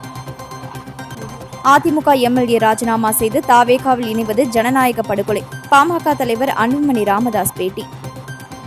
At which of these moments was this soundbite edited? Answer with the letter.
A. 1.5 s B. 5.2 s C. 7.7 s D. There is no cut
A